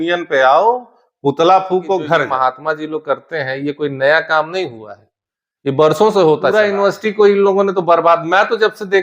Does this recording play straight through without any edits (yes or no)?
no